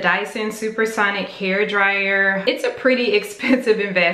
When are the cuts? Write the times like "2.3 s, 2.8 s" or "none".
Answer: 2.4 s